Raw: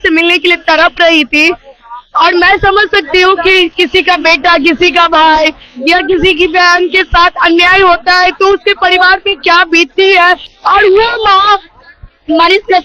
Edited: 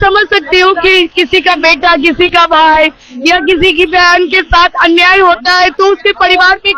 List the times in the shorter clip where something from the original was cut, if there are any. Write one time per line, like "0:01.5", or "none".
none